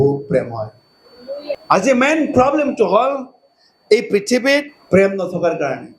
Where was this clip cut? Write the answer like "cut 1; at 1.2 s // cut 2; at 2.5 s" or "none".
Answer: cut 1; at 1.6 s // cut 2; at 4.8 s